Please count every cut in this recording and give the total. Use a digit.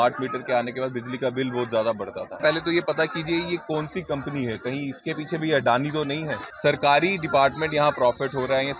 2